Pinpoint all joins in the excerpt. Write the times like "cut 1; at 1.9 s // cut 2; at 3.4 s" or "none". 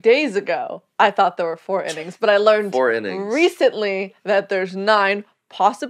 none